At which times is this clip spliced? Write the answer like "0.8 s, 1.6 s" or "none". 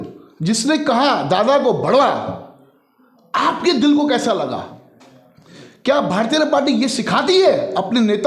none